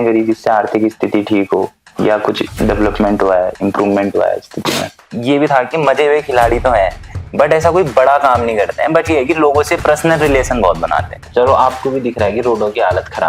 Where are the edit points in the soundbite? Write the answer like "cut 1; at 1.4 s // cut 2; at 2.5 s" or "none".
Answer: cut 1; at 5.0 s // cut 2; at 11.2 s